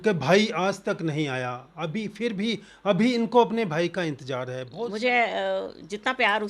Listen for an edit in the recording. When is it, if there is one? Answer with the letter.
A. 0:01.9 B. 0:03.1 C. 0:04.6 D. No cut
C